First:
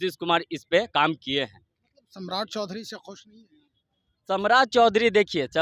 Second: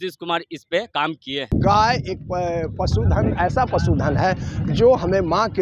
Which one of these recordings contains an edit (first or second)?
second